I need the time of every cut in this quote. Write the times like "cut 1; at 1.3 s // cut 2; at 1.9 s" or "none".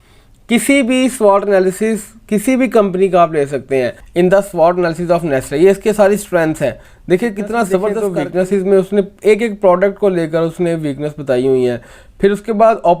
cut 1; at 4.0 s // cut 2; at 8.0 s